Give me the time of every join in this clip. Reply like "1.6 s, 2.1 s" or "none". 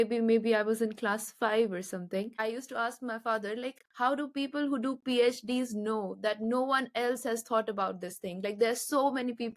2.3 s, 3.8 s